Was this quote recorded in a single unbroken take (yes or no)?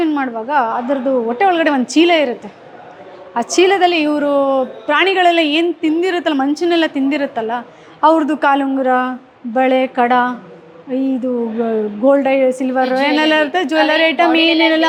yes